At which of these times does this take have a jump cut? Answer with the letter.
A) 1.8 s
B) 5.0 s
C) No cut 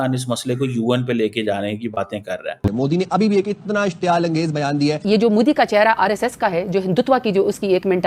B